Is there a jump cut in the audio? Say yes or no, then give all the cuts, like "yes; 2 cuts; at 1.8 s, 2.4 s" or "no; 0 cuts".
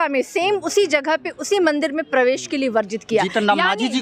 no; 0 cuts